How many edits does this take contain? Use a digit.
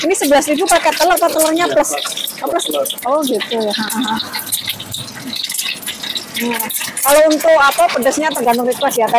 0